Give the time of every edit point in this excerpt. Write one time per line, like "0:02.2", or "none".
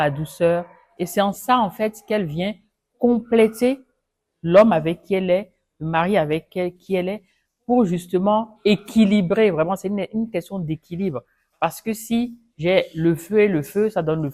none